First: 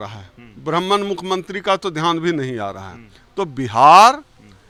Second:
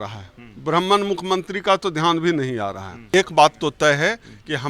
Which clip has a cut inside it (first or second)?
second